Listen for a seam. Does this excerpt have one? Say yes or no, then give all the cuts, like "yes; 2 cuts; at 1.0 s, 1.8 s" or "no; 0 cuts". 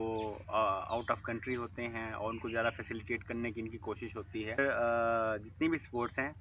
yes; 1 cut; at 4.6 s